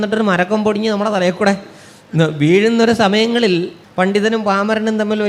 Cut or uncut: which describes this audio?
cut